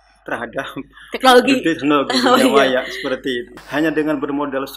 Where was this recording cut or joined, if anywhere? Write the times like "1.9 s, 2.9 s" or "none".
3.4 s